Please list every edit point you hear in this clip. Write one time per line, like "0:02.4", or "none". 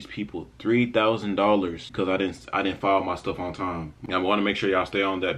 0:01.8
0:03.9